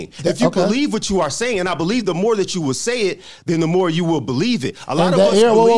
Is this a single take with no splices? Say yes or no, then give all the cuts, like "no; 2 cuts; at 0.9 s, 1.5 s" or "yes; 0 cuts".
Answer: yes; 0 cuts